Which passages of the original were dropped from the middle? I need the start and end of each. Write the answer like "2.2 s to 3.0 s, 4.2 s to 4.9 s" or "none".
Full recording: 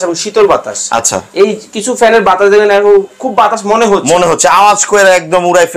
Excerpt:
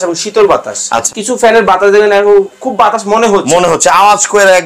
1.1 s to 1.7 s